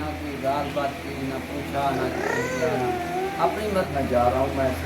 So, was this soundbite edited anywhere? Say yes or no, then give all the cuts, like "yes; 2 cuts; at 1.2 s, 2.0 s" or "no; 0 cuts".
yes; 1 cut; at 3.9 s